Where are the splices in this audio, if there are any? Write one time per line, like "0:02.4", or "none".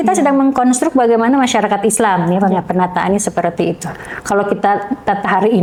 none